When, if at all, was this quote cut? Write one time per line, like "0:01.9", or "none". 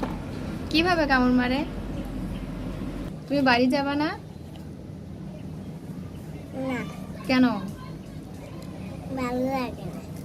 0:03.1